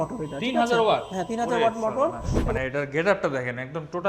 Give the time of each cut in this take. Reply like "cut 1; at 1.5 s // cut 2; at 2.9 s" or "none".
cut 1; at 2.5 s